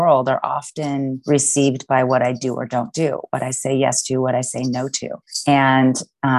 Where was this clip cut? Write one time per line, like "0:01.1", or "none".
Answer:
none